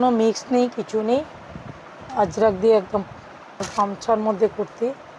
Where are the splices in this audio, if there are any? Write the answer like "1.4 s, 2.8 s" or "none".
3.7 s